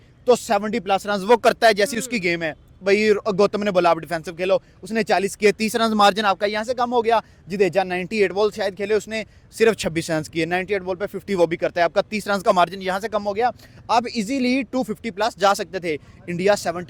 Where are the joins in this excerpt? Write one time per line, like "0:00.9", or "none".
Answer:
none

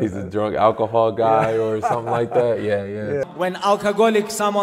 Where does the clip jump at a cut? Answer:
0:03.3

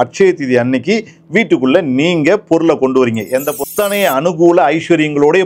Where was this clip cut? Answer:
0:03.6

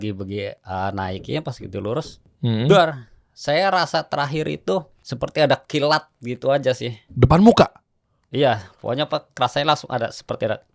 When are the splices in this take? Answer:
0:02.2
0:05.0

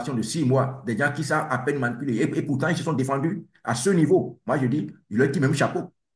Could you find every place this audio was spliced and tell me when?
none

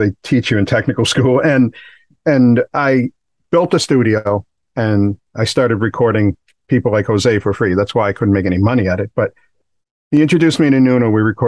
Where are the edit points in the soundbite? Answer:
none

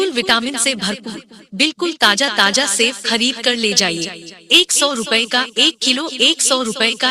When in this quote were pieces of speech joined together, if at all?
none

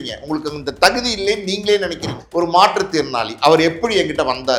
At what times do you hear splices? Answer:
0:02.2

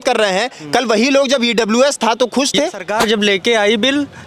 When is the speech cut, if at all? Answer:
0:02.8

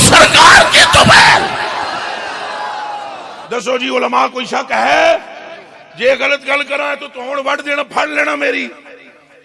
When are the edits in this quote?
0:03.4

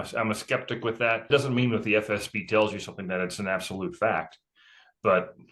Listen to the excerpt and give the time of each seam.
0:01.3

